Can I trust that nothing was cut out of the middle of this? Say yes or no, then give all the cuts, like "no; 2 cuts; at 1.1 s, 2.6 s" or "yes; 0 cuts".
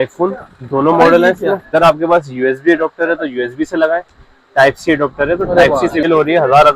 no; 2 cuts; at 1.7 s, 6.0 s